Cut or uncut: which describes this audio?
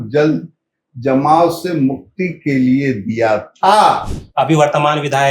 cut